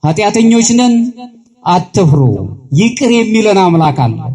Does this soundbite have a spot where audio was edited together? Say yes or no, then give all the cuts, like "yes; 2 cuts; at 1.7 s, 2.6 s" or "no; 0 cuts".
no; 0 cuts